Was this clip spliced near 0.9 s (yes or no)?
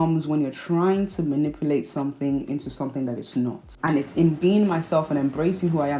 no